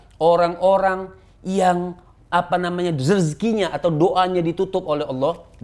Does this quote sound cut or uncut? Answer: uncut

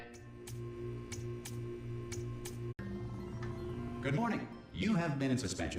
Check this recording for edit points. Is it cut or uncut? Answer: uncut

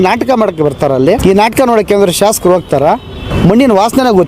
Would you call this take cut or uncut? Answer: cut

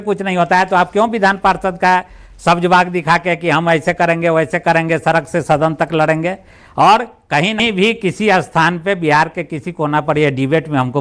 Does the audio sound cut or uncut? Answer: cut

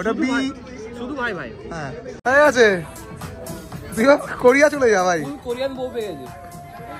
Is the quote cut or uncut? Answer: cut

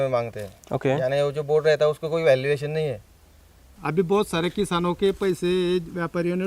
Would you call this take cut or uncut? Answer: cut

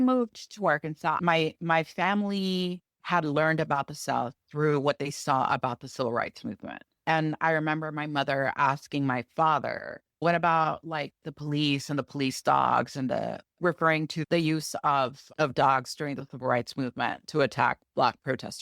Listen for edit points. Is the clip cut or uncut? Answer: cut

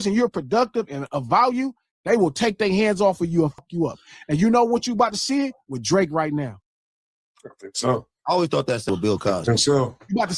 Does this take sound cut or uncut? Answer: cut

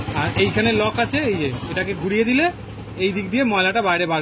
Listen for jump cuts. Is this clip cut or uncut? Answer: uncut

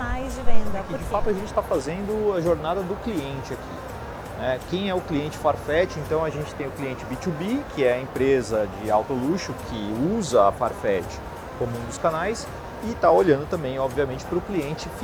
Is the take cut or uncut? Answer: cut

